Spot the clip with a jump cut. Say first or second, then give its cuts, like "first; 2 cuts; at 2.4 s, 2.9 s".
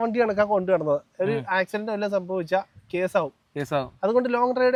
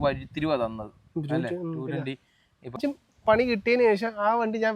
second; 1 cut; at 2.8 s